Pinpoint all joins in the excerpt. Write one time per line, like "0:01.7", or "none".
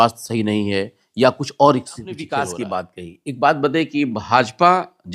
0:02.2